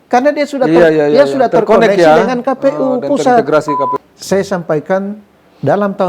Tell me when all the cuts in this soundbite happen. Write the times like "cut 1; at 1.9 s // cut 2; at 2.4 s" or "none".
cut 1; at 4.0 s